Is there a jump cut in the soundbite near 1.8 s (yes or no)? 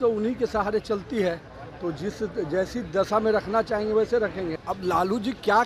no